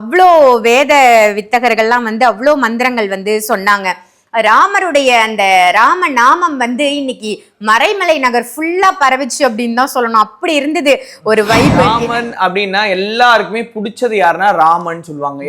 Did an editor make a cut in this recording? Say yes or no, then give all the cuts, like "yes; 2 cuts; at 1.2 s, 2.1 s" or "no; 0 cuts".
yes; 1 cut; at 11.9 s